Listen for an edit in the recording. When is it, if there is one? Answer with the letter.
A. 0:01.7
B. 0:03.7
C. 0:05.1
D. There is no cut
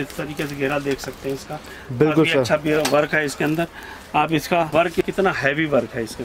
C